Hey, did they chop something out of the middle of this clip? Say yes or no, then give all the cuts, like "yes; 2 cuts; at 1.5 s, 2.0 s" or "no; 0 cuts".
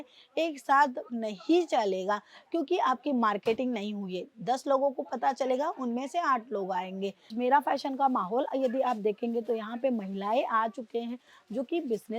yes; 1 cut; at 7.3 s